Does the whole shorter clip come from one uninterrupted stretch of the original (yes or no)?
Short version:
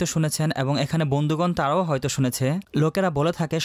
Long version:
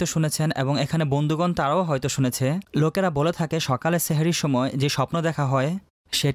yes